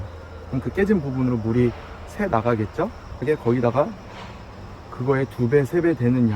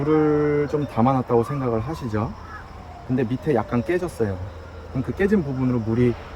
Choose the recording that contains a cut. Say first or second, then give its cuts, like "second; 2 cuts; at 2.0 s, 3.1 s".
first; 1 cut; at 3.2 s